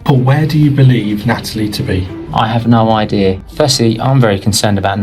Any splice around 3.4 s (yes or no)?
yes